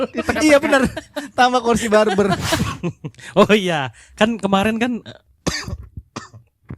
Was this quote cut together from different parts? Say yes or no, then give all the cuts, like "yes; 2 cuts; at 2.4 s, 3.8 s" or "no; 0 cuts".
yes; 1 cut; at 2.6 s